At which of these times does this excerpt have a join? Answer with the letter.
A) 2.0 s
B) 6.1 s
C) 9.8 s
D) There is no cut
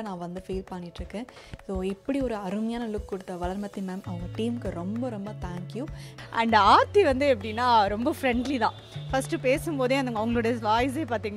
B